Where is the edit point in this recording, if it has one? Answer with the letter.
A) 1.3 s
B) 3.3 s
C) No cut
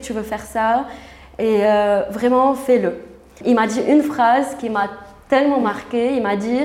B